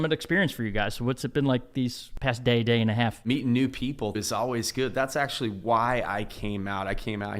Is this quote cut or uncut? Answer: cut